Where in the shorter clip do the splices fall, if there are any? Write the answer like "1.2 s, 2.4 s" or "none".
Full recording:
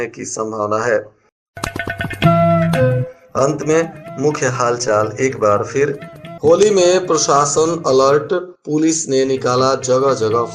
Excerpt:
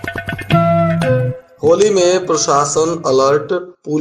1.4 s